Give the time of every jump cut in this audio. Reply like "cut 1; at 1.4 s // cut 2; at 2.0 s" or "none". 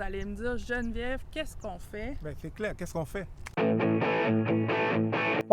cut 1; at 3.4 s